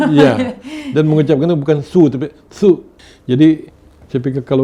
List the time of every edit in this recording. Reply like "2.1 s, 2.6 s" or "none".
2.9 s